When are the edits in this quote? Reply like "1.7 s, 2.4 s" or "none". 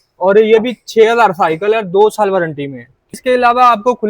3.1 s